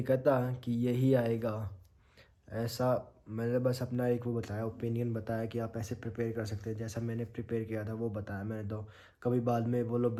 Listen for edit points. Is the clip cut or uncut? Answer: uncut